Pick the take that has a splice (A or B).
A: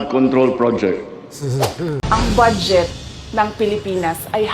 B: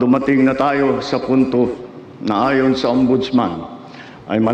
A